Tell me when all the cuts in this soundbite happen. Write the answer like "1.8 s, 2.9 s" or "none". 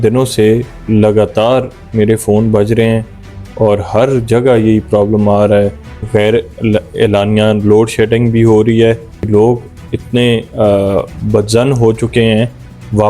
6.0 s, 9.1 s